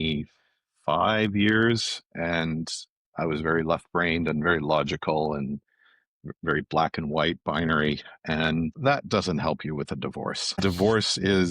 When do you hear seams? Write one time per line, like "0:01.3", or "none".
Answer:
0:08.7
0:10.6